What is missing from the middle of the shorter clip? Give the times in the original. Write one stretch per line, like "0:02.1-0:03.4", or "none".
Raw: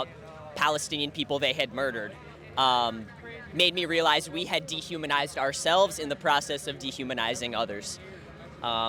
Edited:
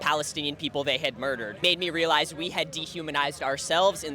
0:02.0-0:03.4